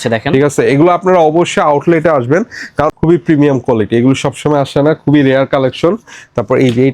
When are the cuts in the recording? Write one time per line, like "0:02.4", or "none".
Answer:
0:03.0